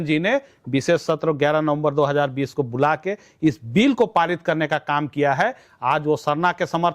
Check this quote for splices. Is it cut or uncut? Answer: cut